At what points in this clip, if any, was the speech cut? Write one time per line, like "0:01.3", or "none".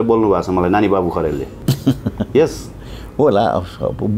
0:01.5